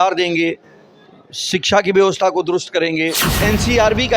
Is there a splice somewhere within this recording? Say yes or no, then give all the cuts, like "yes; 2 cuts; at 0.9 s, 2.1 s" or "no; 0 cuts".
yes; 1 cut; at 3.3 s